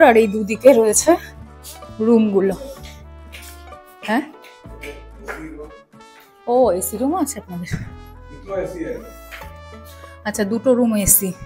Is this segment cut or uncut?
uncut